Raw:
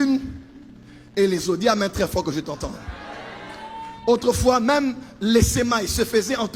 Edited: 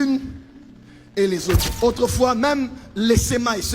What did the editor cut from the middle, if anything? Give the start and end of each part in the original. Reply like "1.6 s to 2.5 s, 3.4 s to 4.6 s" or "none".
1.6 s to 3.8 s